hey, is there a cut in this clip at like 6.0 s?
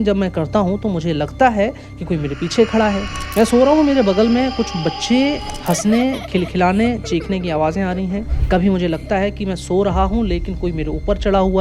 no; 2 cuts; at 3.1 s, 8.3 s

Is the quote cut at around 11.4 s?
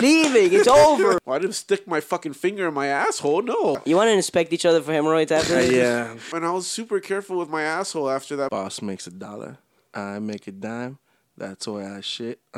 no; 4 cuts; at 1.2 s, 3.8 s, 6.3 s, 8.5 s

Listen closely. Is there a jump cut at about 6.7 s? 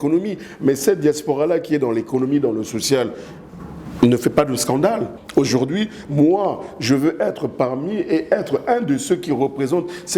no; 1 cut; at 5.1 s

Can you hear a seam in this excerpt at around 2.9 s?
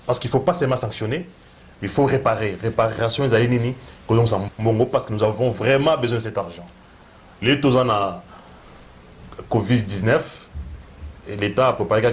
no; 1 cut; at 4.4 s

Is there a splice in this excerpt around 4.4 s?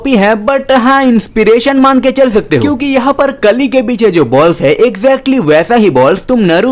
no; 0 cuts

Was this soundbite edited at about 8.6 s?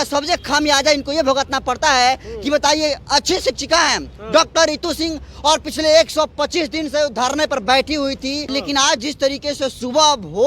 yes; 1 cut; at 8.6 s

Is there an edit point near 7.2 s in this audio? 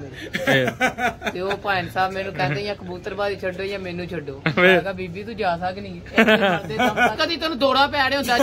yes; 1 cut; at 7.2 s

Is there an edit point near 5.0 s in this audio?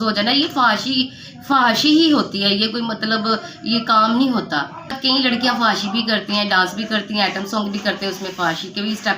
yes; 1 cut; at 5.0 s

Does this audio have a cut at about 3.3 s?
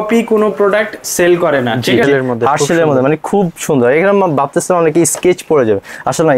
no; 1 cut; at 2.0 s

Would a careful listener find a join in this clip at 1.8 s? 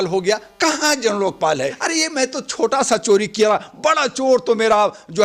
yes; 1 cut; at 1.8 s

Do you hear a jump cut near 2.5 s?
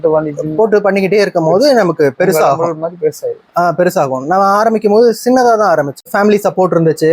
no; 0 cuts

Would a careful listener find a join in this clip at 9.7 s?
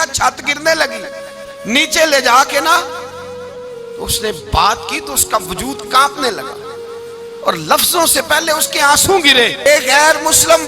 yes; 1 cut; at 9.7 s

